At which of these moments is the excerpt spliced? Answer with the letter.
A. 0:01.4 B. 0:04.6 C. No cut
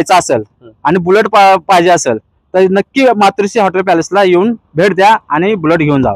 C